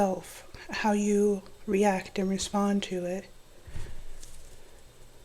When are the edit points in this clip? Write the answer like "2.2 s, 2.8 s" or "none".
none